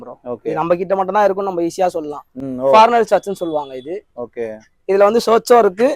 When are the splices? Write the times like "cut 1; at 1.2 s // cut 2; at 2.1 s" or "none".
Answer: none